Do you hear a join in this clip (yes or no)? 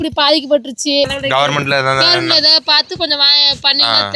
no